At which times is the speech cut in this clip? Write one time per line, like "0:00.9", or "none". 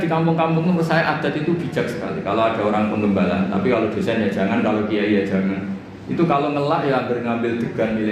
none